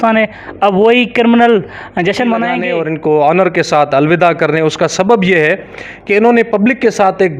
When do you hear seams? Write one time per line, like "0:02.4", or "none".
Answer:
0:02.7